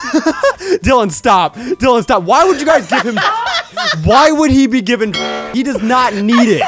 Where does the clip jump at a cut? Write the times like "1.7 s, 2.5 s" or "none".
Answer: 5.2 s